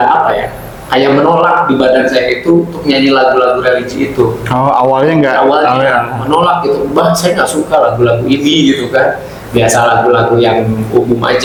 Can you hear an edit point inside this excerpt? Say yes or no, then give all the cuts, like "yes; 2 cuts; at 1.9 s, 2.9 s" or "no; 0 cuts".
no; 0 cuts